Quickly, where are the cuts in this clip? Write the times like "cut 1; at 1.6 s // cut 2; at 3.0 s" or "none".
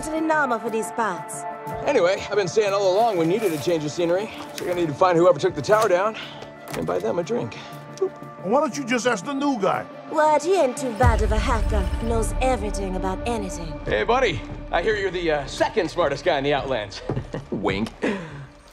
none